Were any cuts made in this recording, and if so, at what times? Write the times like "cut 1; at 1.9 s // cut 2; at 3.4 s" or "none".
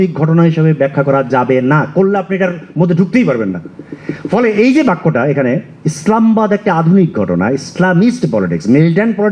none